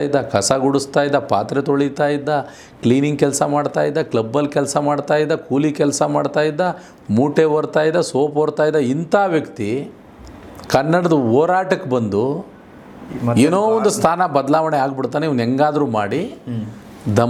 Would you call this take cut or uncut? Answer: uncut